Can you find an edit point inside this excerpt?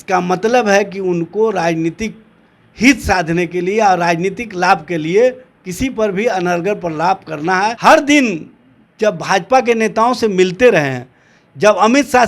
yes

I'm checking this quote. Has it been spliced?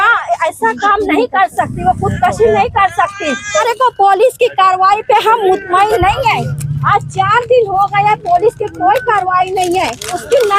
yes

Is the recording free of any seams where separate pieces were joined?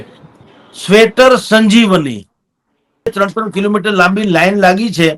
no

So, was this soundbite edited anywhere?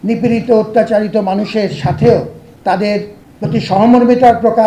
yes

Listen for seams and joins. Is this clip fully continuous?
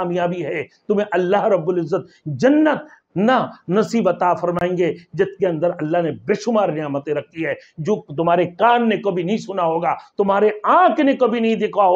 yes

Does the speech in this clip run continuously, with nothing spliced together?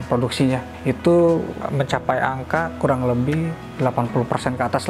yes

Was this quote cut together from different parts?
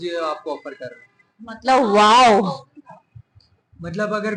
no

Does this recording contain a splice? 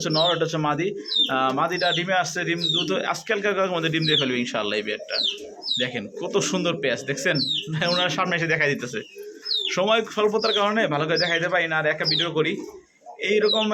no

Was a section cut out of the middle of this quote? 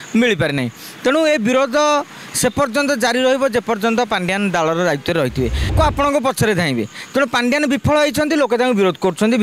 yes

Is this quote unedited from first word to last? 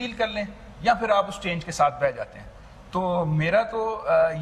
yes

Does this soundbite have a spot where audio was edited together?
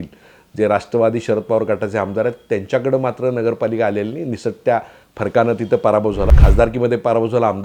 yes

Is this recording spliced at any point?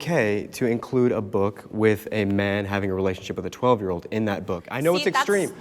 no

